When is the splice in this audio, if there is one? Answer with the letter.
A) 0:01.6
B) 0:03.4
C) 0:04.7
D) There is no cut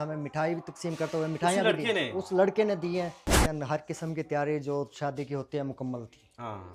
B